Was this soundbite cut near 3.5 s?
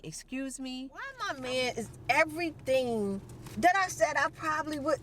no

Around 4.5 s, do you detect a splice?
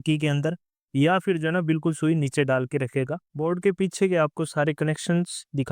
no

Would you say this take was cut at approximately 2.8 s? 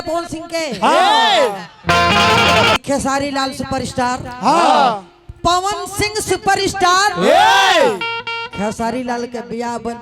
yes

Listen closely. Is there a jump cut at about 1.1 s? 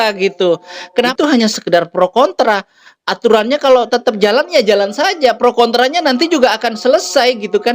yes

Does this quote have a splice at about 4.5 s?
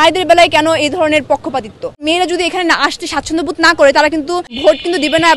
yes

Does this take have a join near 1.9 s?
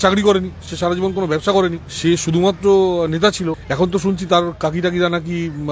yes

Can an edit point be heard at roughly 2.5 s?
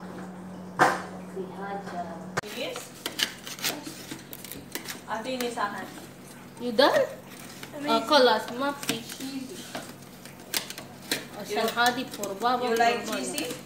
yes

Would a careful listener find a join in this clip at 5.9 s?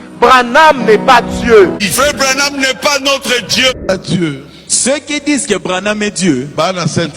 no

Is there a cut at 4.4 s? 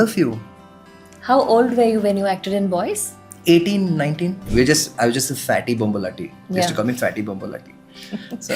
yes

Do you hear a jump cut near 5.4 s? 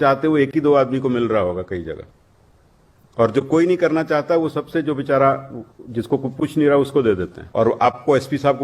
no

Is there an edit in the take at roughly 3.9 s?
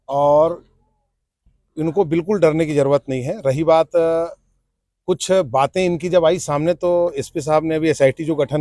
no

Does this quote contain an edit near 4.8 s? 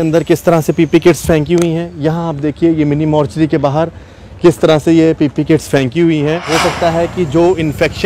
no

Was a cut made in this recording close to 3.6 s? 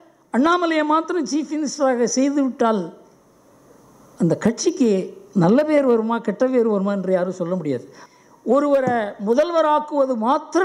no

